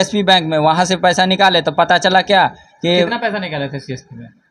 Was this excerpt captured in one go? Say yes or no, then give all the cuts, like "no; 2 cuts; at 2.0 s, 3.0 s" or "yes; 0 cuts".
yes; 0 cuts